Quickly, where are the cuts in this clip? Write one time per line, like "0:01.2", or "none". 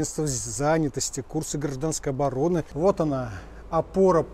0:02.7